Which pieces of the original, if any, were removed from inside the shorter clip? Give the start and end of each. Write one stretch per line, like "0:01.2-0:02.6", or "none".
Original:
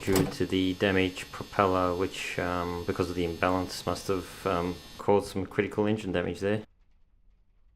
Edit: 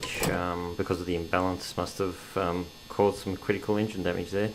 none